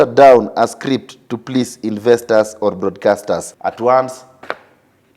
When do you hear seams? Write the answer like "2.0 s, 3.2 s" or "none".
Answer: 3.5 s